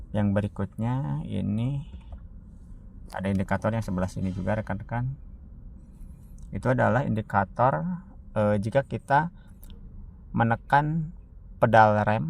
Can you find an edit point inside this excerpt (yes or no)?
no